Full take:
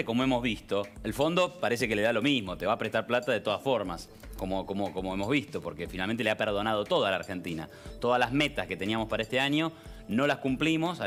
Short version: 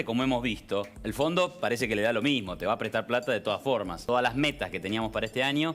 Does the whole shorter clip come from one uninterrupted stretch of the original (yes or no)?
no